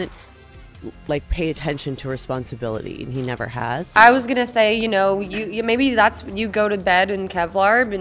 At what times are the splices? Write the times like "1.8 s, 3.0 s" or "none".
none